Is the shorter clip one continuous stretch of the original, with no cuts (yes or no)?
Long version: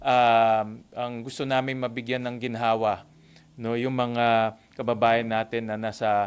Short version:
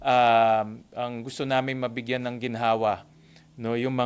yes